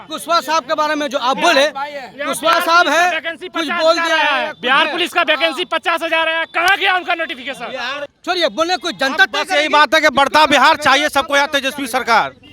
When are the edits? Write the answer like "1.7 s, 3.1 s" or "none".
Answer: 8.0 s